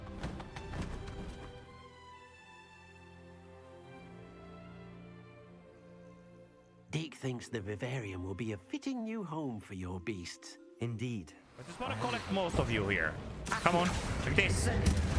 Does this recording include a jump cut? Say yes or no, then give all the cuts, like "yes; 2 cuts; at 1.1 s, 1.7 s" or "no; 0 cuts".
yes; 1 cut; at 11.7 s